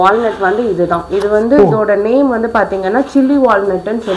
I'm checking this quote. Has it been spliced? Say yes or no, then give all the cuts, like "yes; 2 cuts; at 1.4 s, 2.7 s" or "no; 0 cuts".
no; 0 cuts